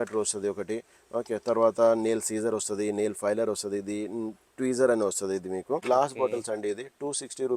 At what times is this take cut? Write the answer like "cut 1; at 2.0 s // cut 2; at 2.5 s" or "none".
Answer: cut 1; at 5.8 s